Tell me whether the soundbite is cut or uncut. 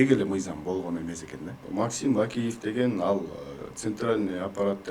cut